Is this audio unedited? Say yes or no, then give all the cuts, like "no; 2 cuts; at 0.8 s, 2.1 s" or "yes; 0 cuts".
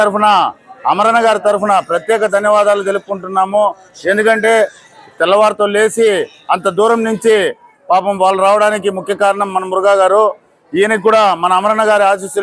yes; 0 cuts